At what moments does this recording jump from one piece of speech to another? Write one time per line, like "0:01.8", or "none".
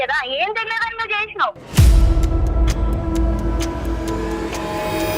0:01.6